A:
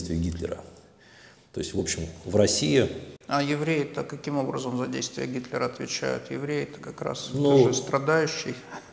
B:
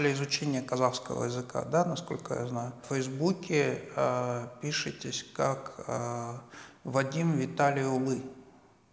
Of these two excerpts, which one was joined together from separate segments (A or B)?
B